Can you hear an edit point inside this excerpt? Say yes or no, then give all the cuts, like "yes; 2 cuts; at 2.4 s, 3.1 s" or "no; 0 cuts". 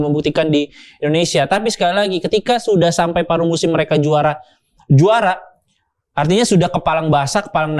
no; 0 cuts